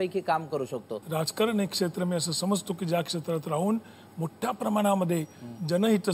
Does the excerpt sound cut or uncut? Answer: cut